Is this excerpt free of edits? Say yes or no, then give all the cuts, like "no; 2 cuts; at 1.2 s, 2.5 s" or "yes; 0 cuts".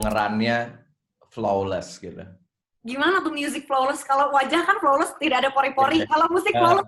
yes; 0 cuts